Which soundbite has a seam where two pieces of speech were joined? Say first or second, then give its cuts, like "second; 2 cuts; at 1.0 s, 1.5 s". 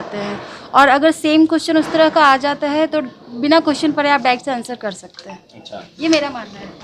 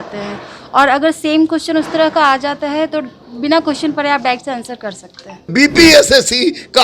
second; 1 cut; at 5.5 s